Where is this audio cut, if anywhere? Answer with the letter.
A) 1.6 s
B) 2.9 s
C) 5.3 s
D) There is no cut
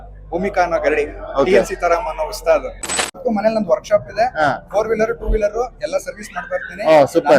B